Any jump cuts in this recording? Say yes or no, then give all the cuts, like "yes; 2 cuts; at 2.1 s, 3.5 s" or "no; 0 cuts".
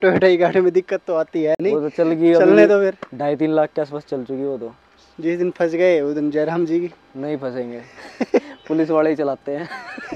no; 0 cuts